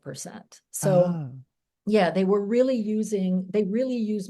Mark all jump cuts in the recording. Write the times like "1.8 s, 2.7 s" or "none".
none